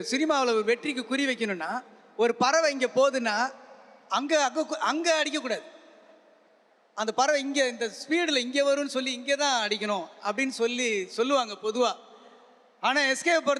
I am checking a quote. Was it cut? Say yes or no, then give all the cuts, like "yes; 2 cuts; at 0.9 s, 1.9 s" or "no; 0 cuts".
no; 0 cuts